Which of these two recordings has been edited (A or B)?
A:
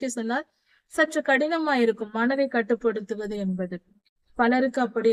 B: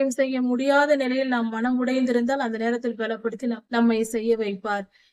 B